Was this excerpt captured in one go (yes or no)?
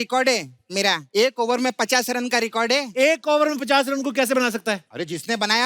no